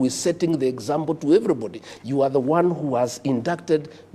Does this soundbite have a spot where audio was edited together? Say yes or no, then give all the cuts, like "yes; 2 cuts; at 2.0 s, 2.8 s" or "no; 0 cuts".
no; 0 cuts